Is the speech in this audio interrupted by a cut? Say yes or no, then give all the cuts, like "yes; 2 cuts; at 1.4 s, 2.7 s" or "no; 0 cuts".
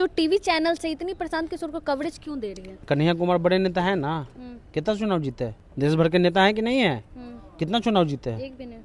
yes; 2 cuts; at 2.8 s, 5.6 s